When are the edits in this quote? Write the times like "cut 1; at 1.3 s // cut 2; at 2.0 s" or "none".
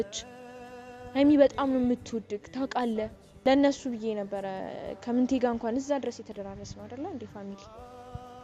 cut 1; at 3.4 s

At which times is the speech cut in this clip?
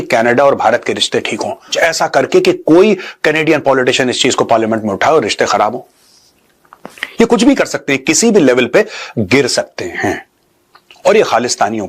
cut 1; at 1.7 s

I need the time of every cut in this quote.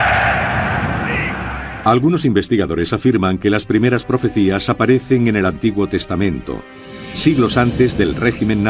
cut 1; at 1.1 s

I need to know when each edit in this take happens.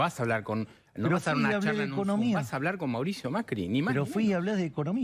none

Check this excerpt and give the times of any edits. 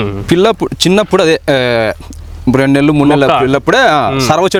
none

